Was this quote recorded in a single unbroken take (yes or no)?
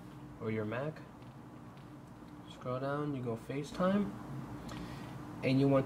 no